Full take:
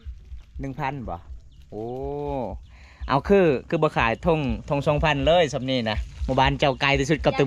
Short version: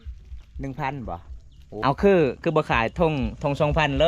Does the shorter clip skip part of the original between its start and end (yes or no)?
yes